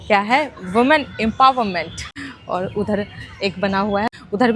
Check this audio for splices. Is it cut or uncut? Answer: uncut